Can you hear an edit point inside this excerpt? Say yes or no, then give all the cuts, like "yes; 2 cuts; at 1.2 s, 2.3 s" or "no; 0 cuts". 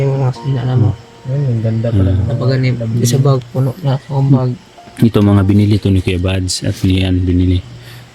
no; 0 cuts